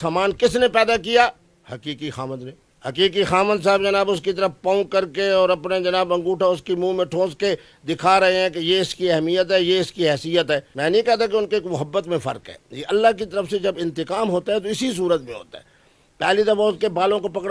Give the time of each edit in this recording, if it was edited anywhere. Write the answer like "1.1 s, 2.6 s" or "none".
none